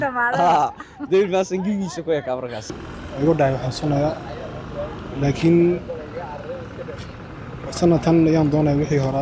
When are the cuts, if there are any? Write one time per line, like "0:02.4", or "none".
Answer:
0:02.9

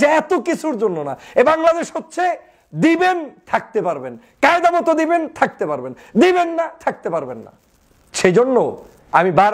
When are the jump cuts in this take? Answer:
none

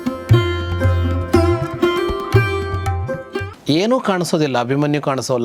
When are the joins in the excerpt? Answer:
0:03.5

